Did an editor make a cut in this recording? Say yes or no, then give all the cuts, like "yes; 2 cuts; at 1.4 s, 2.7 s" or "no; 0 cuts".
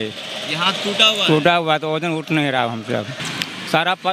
yes; 1 cut; at 3.2 s